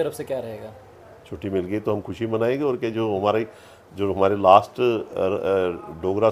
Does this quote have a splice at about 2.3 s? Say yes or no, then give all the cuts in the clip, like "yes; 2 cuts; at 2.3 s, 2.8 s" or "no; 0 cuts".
no; 0 cuts